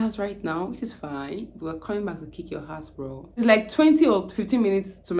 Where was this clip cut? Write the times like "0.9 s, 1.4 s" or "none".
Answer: 3.4 s